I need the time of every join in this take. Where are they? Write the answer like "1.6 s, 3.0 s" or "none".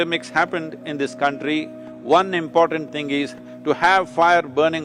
none